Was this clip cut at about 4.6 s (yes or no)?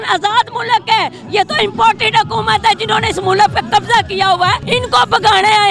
yes